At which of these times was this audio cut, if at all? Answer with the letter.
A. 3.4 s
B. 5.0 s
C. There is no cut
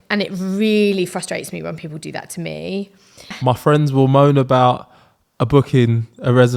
A